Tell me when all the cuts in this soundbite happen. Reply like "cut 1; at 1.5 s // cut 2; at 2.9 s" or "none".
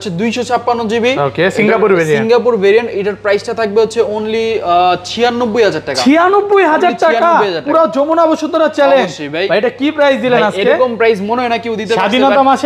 none